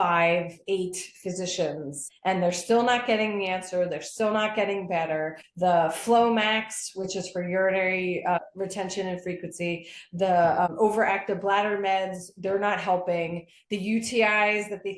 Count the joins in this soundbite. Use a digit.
4